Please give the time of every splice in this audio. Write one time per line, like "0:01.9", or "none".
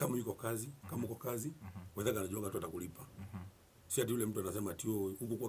none